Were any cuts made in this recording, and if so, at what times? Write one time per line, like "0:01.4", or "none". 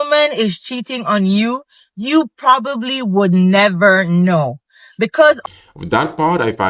none